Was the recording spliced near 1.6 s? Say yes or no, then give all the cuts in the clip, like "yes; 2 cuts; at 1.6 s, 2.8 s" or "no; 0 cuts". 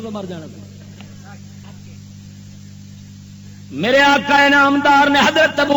yes; 1 cut; at 1.6 s